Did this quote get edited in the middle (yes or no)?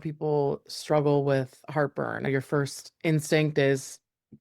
yes